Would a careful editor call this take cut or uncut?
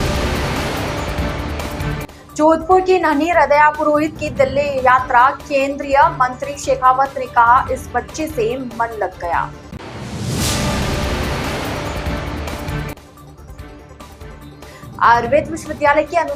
cut